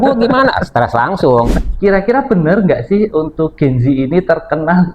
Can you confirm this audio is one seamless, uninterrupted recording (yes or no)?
no